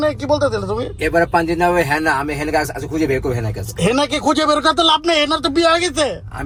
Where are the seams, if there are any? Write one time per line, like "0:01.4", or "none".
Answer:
none

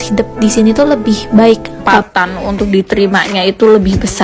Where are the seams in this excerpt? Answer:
0:01.9

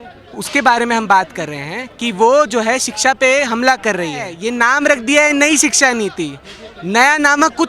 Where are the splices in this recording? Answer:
0:04.4

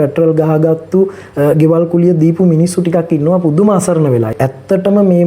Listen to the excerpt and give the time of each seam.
0:04.3

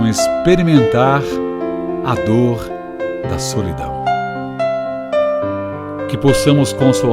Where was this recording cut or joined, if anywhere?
0:03.8

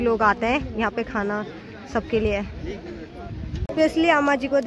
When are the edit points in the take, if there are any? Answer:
0:03.6

